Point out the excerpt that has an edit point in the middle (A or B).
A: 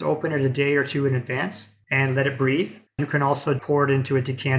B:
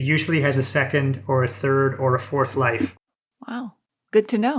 A